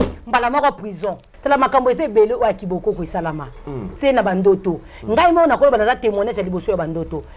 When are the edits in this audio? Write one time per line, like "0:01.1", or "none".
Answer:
0:01.3